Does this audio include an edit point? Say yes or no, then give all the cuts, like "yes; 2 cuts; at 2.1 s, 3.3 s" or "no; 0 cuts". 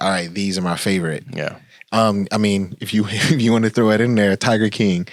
no; 0 cuts